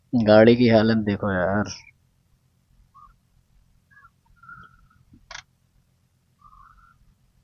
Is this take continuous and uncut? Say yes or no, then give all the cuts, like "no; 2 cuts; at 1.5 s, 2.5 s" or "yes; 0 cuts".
yes; 0 cuts